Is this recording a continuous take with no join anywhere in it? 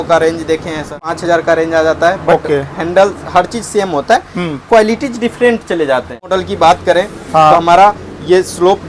no; 2 cuts; at 1.2 s, 6.2 s

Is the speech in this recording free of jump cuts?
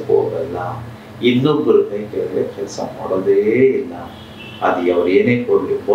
yes; 0 cuts

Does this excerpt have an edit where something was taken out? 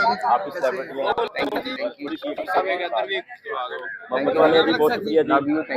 no; 0 cuts

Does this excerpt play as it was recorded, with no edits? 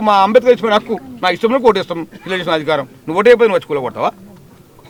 yes; 0 cuts

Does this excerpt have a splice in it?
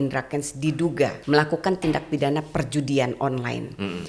yes; 1 cut; at 1.2 s

